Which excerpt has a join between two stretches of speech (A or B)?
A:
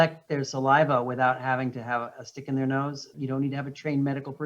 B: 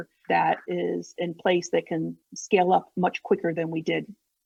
A